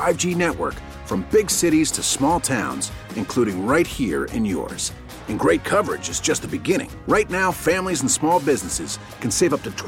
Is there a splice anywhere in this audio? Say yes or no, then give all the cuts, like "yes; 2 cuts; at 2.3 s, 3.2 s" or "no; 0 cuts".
no; 0 cuts